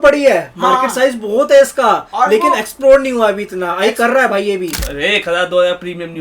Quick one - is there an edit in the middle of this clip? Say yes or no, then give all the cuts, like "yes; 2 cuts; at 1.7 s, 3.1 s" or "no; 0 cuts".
yes; 1 cut; at 4.7 s